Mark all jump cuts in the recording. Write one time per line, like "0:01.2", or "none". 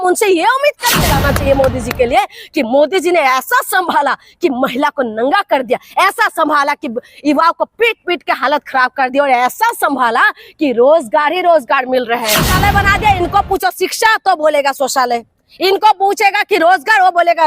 0:01.1
0:12.5